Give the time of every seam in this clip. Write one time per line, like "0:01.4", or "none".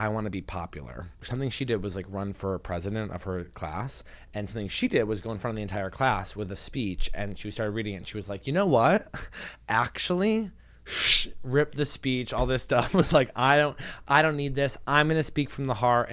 0:01.2

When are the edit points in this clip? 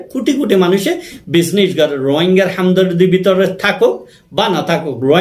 none

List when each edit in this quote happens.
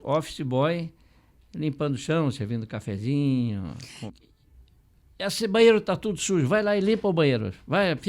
0:03.9

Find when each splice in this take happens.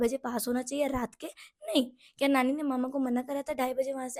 none

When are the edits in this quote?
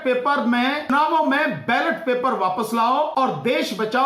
0:00.9
0:03.1

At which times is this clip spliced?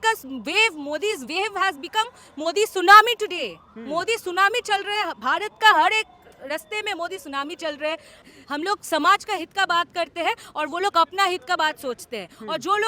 0:08.2

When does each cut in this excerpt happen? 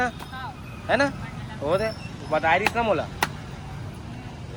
none

